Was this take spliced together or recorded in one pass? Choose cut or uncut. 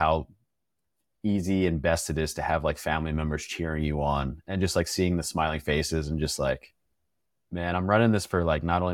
uncut